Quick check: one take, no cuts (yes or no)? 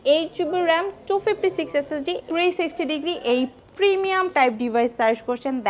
no